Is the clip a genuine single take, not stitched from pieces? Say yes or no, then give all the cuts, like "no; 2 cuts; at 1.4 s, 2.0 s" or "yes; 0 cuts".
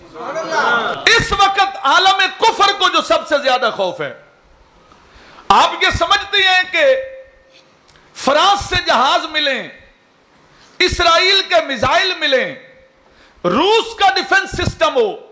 no; 1 cut; at 0.9 s